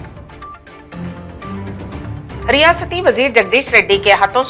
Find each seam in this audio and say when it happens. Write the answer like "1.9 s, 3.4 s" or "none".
0.9 s